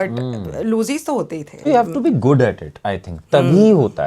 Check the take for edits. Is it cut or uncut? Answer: cut